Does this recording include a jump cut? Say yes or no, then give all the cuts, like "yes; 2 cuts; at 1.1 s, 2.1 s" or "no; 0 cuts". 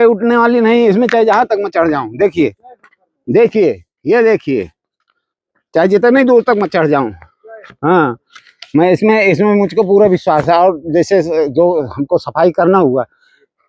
no; 0 cuts